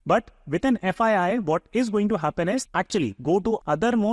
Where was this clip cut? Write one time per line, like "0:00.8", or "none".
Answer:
0:02.6